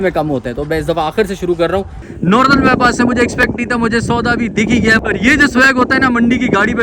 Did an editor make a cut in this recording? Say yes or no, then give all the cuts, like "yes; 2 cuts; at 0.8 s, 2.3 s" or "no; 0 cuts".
yes; 2 cuts; at 2.0 s, 5.0 s